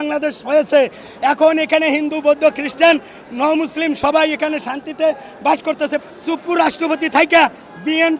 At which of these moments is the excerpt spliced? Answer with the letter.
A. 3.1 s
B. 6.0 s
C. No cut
B